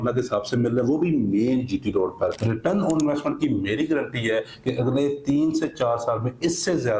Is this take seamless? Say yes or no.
no